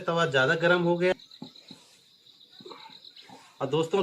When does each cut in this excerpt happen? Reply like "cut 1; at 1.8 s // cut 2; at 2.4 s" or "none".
cut 1; at 1.1 s